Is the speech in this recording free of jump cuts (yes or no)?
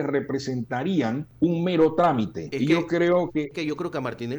no